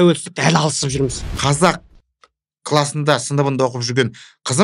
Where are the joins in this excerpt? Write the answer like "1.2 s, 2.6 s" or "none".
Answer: 1.2 s